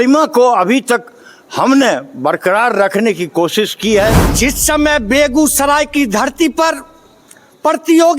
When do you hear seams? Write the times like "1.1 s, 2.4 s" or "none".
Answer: 4.3 s